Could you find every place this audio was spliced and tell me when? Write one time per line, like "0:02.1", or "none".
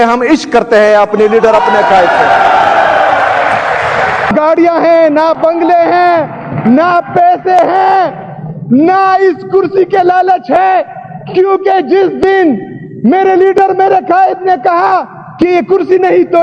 0:04.3

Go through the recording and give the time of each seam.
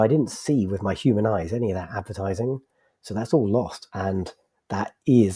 0:03.8

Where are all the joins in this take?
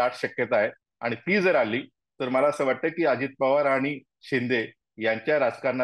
none

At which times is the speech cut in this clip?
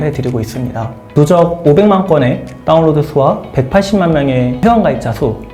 0:01.0
0:04.6

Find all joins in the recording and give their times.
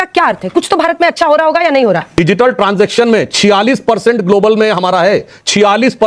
0:02.1

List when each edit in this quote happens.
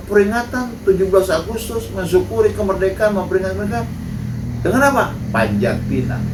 none

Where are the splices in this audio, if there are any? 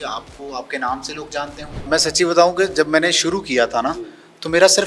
0:01.8

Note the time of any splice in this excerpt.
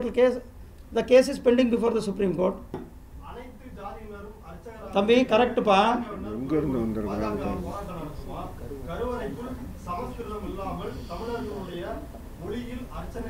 0:02.7

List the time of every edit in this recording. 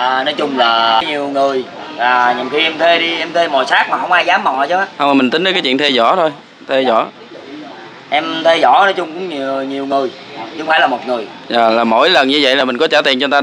0:01.0

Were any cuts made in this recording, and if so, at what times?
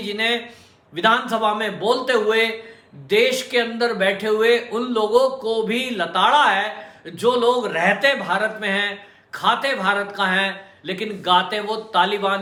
none

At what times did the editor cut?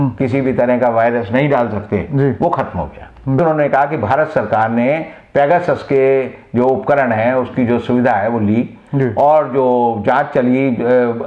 0:03.4

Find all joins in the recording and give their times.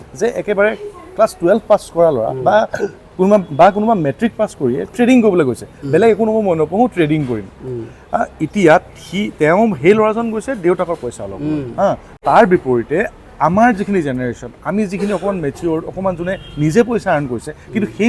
0:12.1

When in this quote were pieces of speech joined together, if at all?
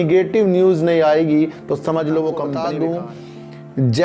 0:02.5

